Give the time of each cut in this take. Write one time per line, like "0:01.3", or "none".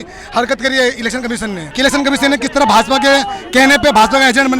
0:01.6